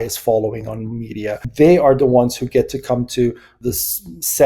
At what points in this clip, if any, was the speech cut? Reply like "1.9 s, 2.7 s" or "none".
1.4 s, 3.6 s